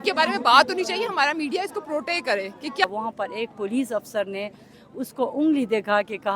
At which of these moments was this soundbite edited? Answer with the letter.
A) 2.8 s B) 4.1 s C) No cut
A